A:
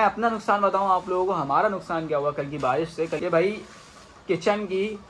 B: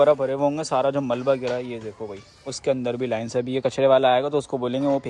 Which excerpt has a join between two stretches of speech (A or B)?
A